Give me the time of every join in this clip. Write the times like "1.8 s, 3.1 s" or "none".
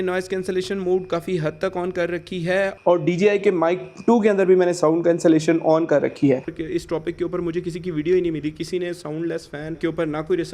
6.4 s